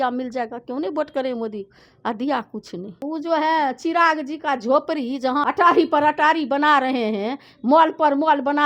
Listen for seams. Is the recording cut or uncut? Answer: cut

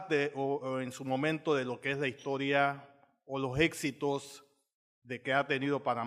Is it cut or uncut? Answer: uncut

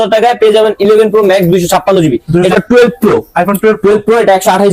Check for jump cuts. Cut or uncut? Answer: cut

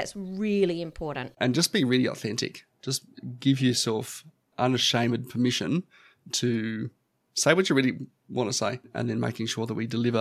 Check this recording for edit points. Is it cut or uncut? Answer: cut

